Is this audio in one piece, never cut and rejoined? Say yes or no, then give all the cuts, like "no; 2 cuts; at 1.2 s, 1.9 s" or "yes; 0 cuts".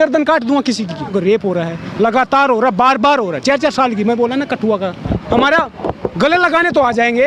no; 2 cuts; at 1.1 s, 5.0 s